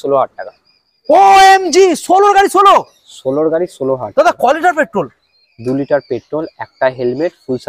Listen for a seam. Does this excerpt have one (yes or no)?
no